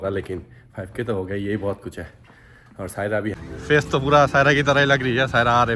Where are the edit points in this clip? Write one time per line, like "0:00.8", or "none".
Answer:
0:03.4